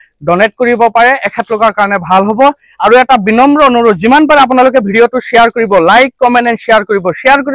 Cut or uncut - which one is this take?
uncut